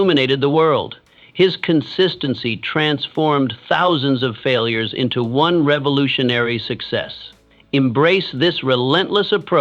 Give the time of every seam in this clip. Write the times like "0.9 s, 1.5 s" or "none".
none